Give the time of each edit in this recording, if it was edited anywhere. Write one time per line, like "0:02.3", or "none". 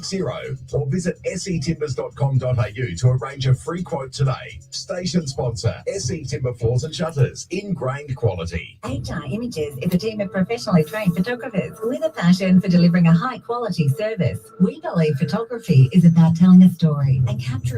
0:08.8